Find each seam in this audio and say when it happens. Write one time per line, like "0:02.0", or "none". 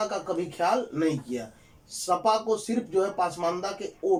none